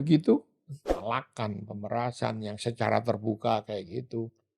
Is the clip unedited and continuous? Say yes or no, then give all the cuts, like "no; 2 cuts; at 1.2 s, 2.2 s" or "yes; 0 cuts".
no; 1 cut; at 1.0 s